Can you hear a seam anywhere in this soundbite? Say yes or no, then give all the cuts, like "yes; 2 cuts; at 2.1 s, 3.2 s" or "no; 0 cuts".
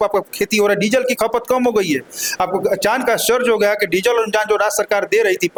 no; 0 cuts